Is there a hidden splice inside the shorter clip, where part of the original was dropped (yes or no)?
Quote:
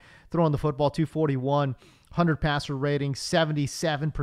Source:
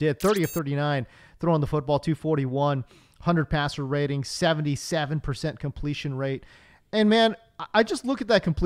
no